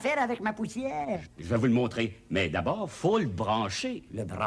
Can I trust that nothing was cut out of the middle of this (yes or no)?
no